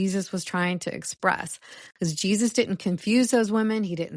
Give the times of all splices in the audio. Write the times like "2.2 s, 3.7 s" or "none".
none